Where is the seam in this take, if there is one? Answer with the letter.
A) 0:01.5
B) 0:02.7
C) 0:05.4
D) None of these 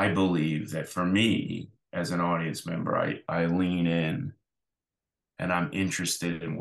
D